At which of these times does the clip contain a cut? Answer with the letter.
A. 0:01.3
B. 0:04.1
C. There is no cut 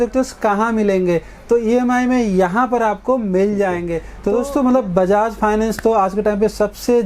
B